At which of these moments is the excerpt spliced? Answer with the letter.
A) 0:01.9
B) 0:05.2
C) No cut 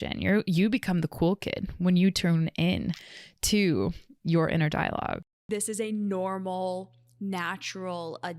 B